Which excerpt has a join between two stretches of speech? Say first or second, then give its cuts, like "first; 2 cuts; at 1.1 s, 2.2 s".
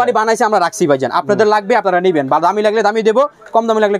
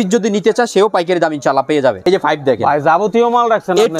second; 1 cut; at 2.0 s